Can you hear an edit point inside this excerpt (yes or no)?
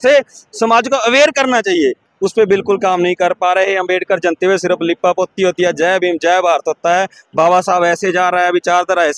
no